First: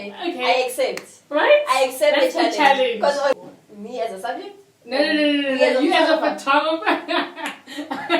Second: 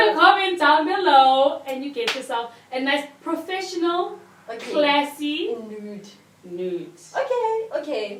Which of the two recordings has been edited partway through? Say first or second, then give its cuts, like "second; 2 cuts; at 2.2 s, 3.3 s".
first; 1 cut; at 3.4 s